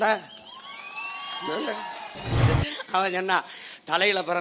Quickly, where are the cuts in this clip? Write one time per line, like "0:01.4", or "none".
0:02.4